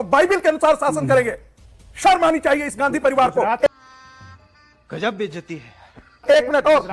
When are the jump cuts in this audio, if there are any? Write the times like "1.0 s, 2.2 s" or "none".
none